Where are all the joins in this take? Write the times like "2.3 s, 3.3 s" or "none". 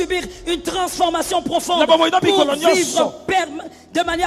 none